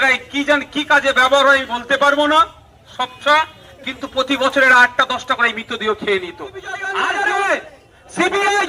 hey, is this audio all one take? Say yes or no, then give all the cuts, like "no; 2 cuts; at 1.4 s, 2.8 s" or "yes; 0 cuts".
no; 1 cut; at 6.8 s